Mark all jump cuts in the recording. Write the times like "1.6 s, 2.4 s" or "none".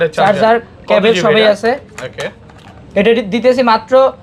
none